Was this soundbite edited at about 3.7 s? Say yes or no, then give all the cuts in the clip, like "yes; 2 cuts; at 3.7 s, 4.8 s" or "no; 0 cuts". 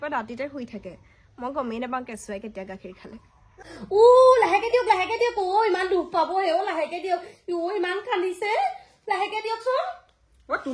yes; 1 cut; at 3.7 s